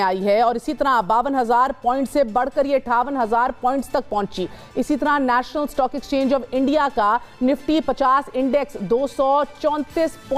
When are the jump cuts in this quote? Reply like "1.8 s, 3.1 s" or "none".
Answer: none